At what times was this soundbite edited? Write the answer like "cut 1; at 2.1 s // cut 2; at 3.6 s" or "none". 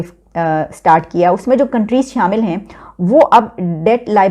none